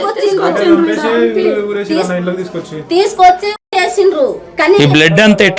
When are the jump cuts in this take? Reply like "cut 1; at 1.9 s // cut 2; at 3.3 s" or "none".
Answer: none